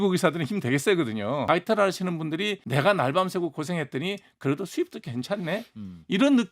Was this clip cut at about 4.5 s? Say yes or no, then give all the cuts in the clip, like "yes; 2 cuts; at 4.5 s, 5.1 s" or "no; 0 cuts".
no; 2 cuts; at 1.4 s, 2.6 s